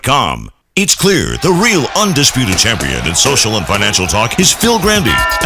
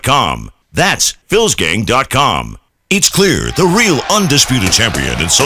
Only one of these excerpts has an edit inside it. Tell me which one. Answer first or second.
second